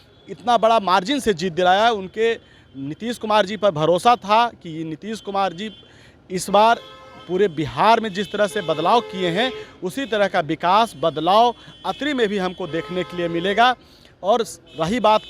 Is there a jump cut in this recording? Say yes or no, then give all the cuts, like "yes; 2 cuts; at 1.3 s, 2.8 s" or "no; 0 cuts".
no; 0 cuts